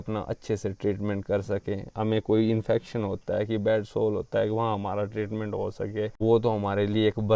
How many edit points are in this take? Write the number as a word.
one